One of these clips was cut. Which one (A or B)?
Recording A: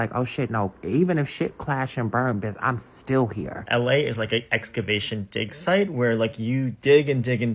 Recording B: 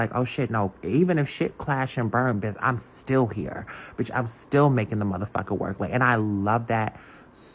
A